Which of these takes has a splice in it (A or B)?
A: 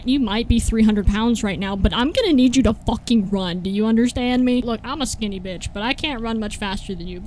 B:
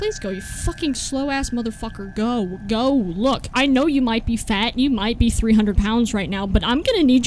A